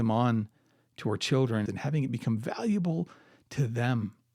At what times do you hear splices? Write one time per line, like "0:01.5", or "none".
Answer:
0:01.6